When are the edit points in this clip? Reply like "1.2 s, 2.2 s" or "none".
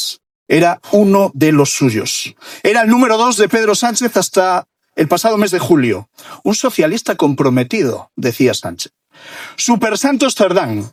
none